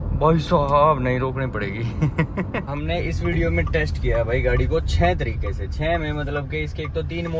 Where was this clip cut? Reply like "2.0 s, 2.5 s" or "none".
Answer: 2.7 s